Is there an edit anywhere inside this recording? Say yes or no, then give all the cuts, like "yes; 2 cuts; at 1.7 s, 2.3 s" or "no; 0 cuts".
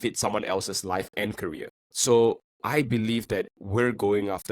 yes; 1 cut; at 1.8 s